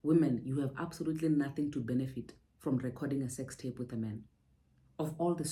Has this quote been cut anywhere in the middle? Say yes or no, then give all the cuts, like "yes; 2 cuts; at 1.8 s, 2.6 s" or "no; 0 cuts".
no; 0 cuts